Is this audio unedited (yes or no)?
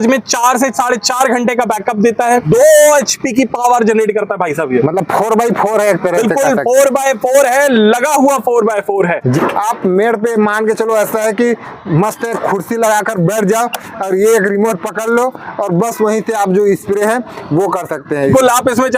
no